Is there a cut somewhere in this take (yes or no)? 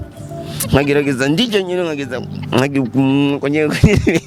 no